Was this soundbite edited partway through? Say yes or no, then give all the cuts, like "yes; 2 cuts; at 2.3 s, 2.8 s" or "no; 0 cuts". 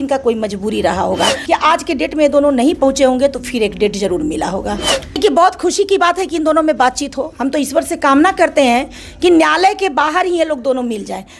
yes; 2 cuts; at 1.3 s, 5.2 s